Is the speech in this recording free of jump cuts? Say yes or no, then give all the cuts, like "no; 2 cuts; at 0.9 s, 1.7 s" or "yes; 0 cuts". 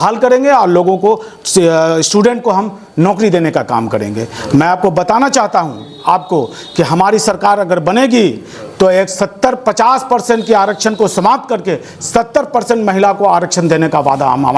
yes; 0 cuts